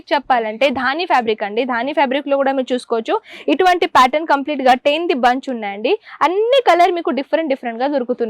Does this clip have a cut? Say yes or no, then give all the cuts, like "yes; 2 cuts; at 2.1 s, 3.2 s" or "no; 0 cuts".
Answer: no; 0 cuts